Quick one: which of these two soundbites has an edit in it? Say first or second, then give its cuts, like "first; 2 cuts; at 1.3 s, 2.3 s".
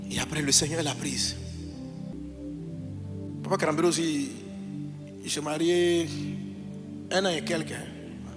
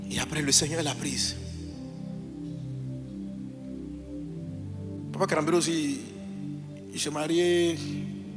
first; 1 cut; at 2.1 s